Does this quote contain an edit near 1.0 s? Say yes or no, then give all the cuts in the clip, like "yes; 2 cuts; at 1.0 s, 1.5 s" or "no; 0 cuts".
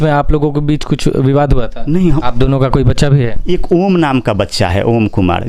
no; 2 cuts; at 2.2 s, 3.4 s